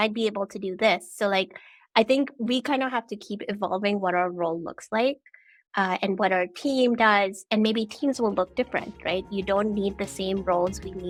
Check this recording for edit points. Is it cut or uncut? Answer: uncut